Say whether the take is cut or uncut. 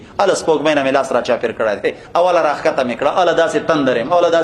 uncut